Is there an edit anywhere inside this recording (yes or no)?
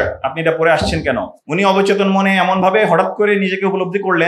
yes